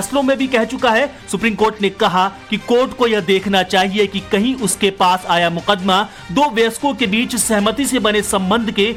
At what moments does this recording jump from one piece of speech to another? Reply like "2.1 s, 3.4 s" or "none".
none